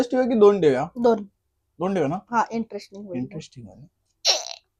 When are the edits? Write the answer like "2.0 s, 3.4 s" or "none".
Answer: none